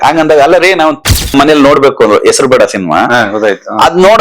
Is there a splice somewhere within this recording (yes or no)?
yes